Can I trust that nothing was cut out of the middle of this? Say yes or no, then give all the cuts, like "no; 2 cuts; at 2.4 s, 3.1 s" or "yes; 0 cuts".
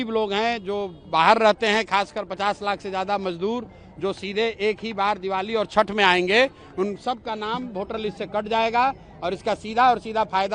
yes; 0 cuts